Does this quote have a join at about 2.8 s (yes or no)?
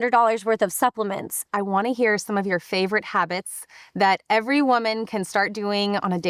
no